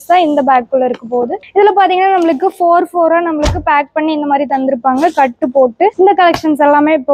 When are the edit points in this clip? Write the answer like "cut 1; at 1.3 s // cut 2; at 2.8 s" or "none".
cut 1; at 5.9 s